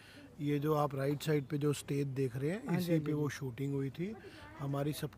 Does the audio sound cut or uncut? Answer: uncut